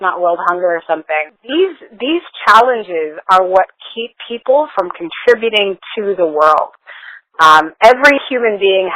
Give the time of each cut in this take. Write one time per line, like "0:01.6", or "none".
0:01.4